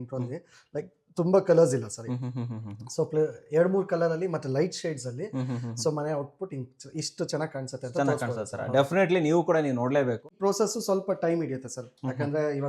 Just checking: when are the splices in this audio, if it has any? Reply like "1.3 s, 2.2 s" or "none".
10.2 s